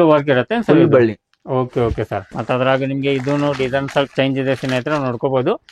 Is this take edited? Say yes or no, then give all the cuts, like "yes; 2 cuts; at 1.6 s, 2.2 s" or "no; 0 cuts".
yes; 1 cut; at 2.3 s